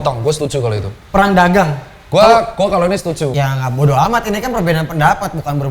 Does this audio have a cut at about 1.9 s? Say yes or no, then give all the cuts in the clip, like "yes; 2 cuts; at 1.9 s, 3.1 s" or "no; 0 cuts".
no; 1 cut; at 3.3 s